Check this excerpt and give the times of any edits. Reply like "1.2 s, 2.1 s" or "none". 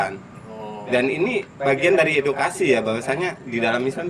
none